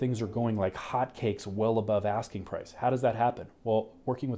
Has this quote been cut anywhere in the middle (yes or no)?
no